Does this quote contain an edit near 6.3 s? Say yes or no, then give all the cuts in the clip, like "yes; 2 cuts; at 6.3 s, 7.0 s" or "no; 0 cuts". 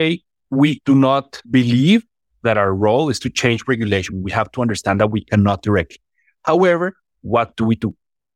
no; 3 cuts; at 0.8 s, 1.4 s, 4.1 s